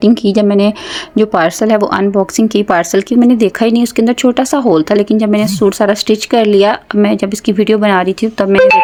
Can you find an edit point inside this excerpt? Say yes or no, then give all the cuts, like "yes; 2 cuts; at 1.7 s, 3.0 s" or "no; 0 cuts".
no; 0 cuts